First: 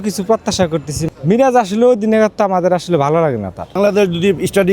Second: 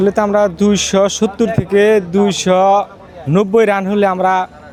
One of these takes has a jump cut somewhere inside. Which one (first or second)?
first